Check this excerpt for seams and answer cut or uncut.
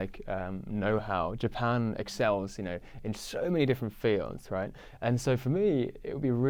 uncut